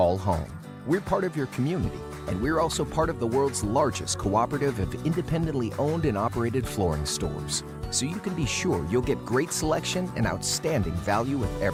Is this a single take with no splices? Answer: yes; 0 cuts

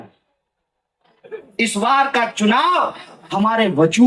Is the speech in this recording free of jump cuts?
no; 1 cut; at 1.5 s

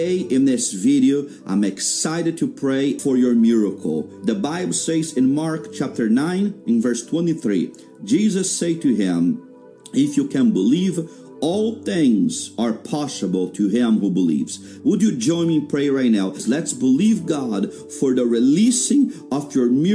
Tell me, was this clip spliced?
yes; 1 cut; at 3.0 s

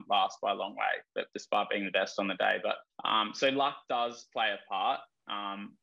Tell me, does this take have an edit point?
yes; 2 cuts; at 1.3 s, 2.9 s

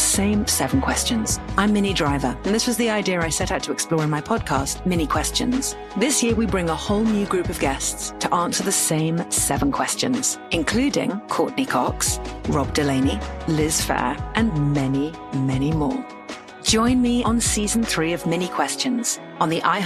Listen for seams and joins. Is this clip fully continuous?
yes; 0 cuts

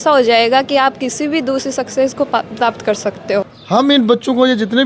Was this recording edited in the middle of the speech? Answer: yes; 1 cut; at 3.5 s

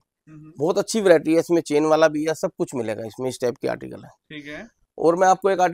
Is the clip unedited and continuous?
yes; 0 cuts

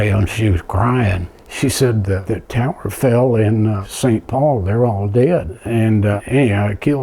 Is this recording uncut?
no; 1 cut; at 5.6 s

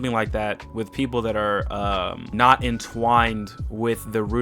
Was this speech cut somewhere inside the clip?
yes; 1 cut; at 2.3 s

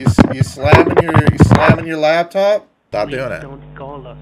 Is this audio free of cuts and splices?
no; 1 cut; at 2.8 s

